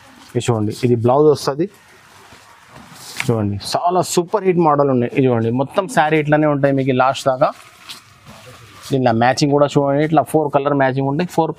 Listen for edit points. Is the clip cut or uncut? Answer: uncut